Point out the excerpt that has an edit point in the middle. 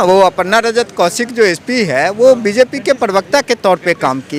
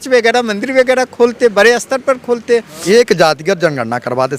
second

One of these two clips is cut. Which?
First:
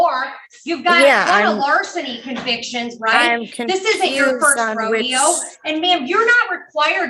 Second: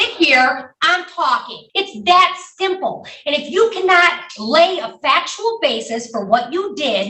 second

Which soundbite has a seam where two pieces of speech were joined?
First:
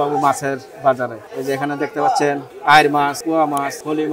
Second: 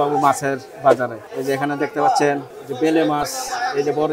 second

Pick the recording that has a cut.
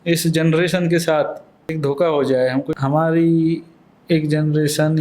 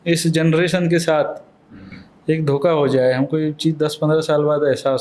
first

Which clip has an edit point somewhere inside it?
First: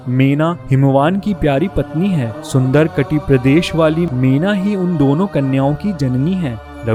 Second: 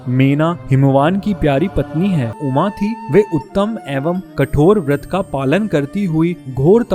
second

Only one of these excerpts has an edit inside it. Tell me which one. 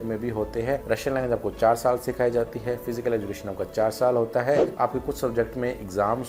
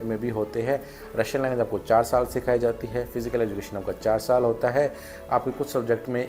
first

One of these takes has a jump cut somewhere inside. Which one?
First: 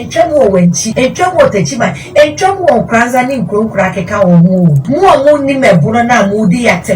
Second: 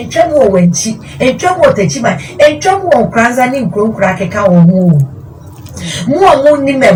first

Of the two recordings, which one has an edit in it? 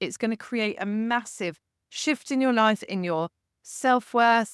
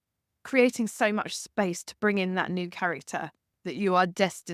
first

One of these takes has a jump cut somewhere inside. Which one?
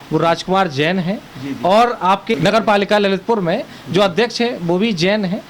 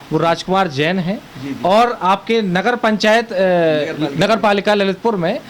first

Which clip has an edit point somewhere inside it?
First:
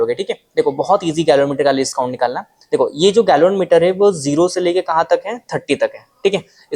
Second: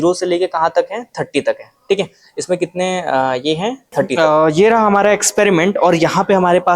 second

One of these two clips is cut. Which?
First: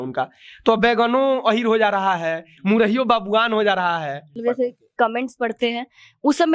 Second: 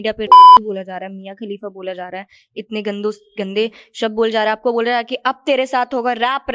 first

